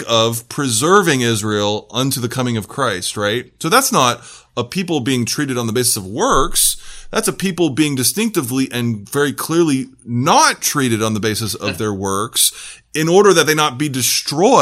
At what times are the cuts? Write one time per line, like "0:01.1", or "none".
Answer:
none

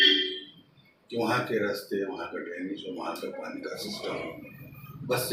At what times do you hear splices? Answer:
none

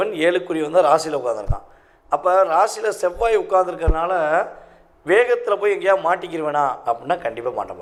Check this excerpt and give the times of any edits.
none

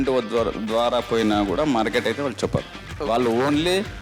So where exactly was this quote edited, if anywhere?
0:02.8

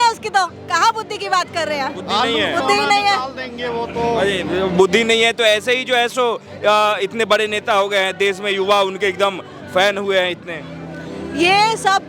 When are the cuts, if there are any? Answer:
none

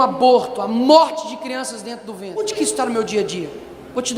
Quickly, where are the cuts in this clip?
0:02.4

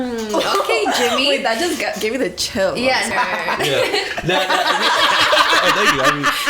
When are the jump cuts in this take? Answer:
0:03.1

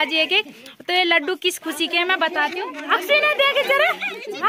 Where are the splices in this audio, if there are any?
none

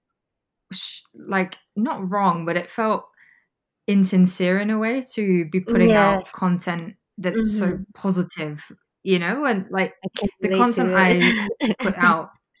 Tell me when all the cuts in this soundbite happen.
none

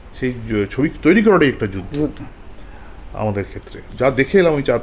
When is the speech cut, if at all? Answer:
0:03.8

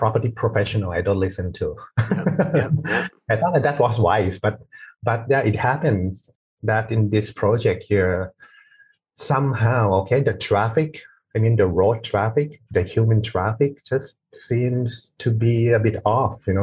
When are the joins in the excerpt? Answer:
none

